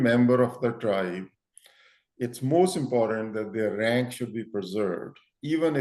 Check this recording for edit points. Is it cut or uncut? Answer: uncut